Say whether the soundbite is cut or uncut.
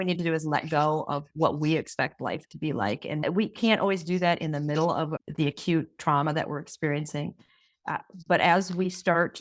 uncut